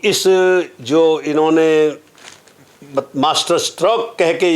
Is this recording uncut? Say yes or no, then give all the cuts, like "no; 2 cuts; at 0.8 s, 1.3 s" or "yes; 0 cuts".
yes; 0 cuts